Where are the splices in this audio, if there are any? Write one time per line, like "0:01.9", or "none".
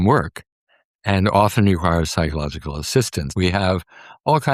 0:03.3